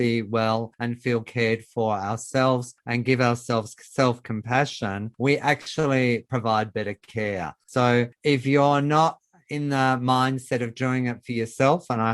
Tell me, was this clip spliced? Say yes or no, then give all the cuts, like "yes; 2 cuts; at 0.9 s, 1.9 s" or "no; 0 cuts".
yes; 1 cut; at 7.6 s